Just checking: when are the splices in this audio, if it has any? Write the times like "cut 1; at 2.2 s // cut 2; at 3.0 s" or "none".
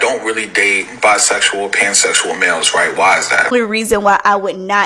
cut 1; at 3.5 s

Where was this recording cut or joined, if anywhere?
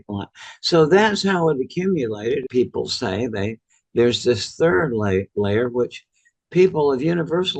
cut 1; at 2.4 s

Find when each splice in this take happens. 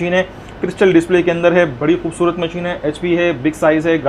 none

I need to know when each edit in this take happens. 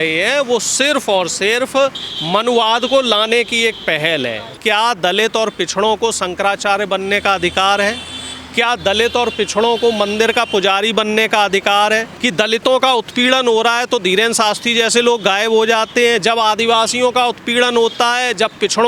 cut 1; at 4.5 s // cut 2; at 12.1 s

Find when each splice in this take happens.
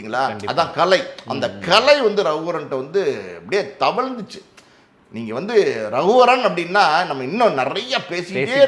none

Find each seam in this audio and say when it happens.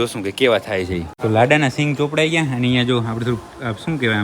cut 1; at 1.1 s

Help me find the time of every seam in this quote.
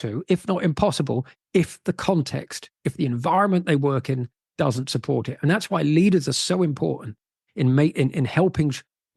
none

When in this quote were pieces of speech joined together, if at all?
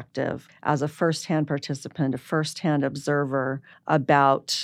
none

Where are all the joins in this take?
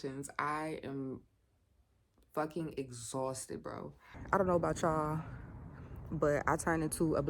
cut 1; at 4.2 s

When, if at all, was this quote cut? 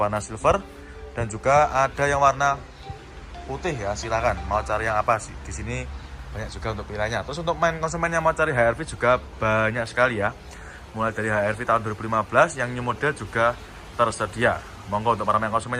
none

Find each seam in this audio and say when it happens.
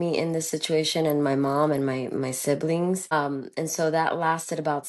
cut 1; at 3.1 s

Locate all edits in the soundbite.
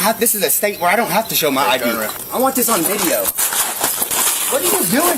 cut 1; at 2.1 s

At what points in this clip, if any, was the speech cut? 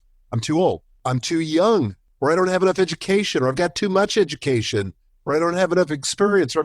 cut 1; at 1.0 s // cut 2; at 2.0 s

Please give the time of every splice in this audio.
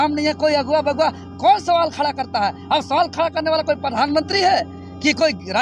none

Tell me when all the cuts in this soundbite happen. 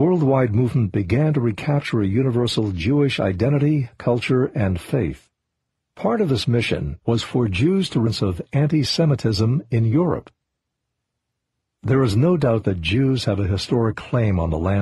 none

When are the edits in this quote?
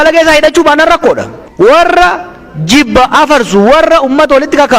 cut 1; at 1.4 s

